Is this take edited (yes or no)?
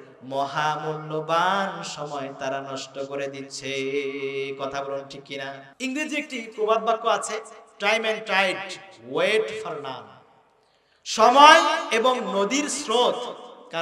yes